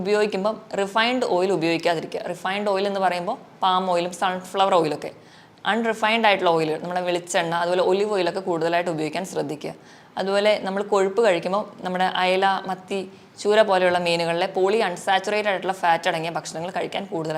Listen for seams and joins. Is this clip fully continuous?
yes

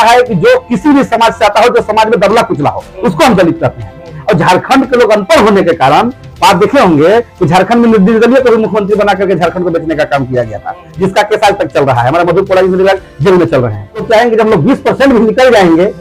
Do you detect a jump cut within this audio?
yes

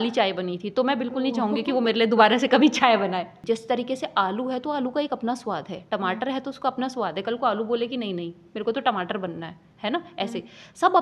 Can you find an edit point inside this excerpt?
yes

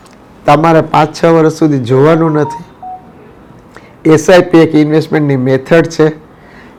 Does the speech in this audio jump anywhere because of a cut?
no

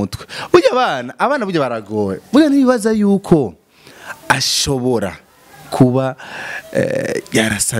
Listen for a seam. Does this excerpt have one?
no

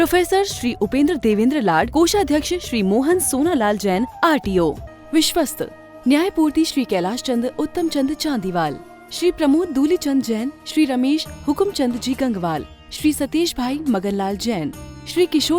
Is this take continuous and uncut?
no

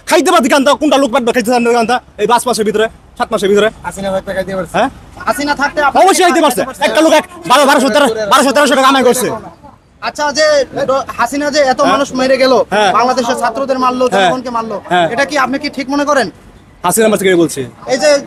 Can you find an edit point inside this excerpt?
no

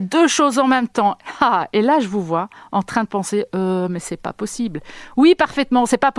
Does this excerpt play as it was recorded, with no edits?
yes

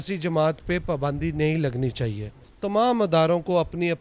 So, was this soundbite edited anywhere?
yes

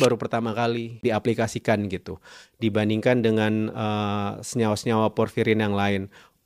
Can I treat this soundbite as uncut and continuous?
no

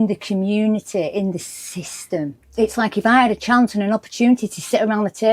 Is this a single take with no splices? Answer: no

